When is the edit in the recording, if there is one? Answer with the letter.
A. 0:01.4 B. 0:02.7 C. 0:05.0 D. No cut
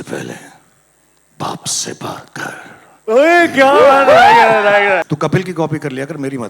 C